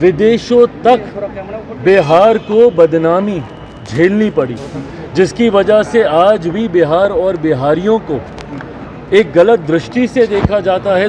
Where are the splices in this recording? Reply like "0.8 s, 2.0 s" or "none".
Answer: none

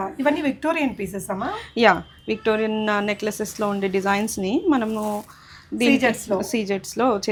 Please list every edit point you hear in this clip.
none

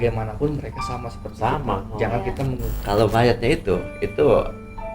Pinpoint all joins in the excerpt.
2.7 s

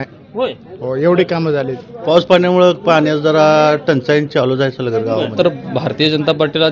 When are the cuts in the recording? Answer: 2.0 s, 5.3 s

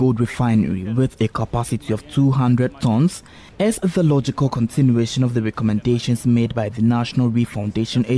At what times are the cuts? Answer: none

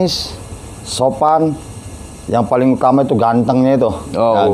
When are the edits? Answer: none

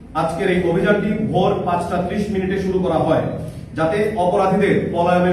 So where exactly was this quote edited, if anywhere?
none

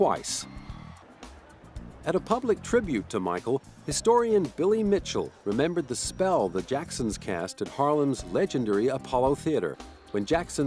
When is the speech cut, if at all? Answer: 1.6 s

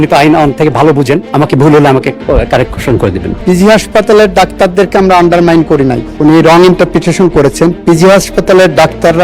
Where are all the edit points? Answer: 1.3 s, 3.3 s, 6.1 s

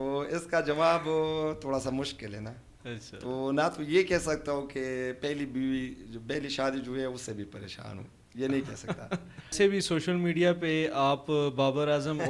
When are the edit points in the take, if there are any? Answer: 9.5 s

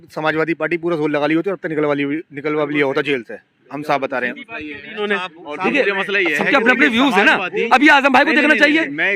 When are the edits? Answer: none

